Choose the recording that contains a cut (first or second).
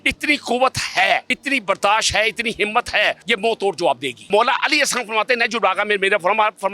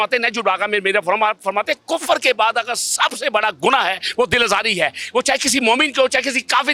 first